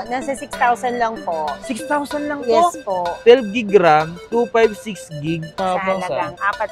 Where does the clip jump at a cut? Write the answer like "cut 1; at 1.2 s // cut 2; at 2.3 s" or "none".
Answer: cut 1; at 3.1 s // cut 2; at 5.6 s